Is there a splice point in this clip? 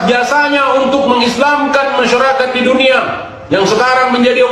no; 0 cuts

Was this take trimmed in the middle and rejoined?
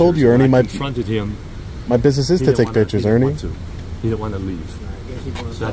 no; 0 cuts

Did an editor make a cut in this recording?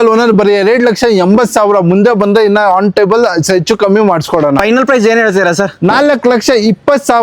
yes; 1 cut; at 4.6 s

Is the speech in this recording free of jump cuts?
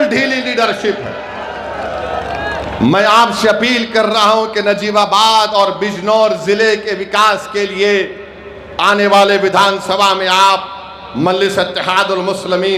yes; 0 cuts

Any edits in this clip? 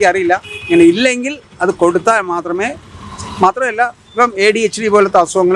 no; 0 cuts

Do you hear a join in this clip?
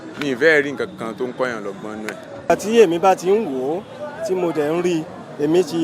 yes; 1 cut; at 2.5 s

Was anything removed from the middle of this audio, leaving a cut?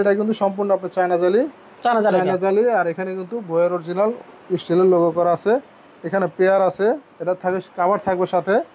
no; 0 cuts

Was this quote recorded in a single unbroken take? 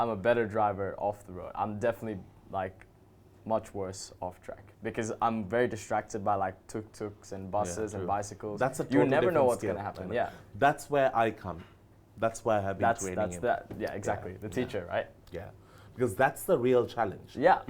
yes; 0 cuts

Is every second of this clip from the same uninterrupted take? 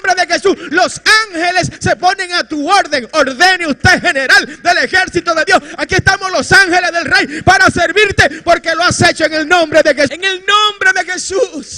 no; 2 cuts; at 1.7 s, 10.1 s

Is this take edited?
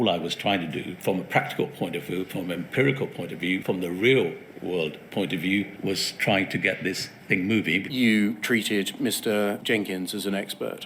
yes; 5 cuts; at 0.9 s, 3.6 s, 5.7 s, 7.9 s, 9.6 s

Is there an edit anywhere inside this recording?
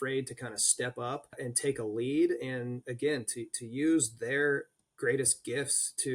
yes; 1 cut; at 1.4 s

